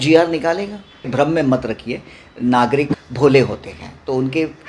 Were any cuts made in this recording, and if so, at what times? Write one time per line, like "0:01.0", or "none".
0:01.1
0:03.0